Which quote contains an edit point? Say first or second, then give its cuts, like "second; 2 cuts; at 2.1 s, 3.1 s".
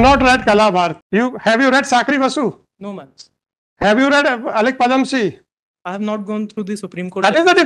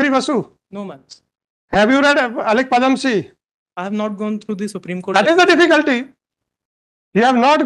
first; 1 cut; at 1.0 s